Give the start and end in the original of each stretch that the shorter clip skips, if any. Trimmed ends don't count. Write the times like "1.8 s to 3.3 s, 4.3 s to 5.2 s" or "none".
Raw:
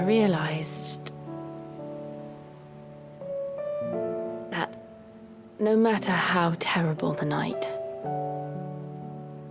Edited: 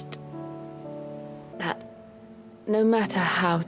2.5 s to 4.5 s